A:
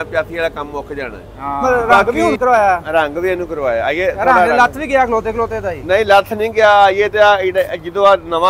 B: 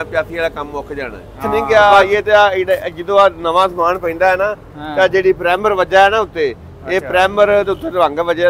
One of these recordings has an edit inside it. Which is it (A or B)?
B